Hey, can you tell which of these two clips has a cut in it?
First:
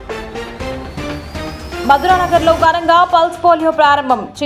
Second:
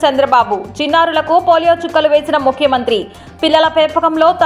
first; 1 cut; at 1.5 s

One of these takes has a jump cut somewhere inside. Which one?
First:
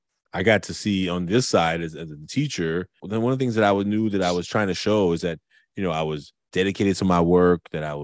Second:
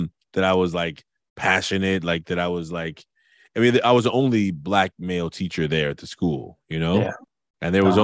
first; 1 cut; at 3.0 s

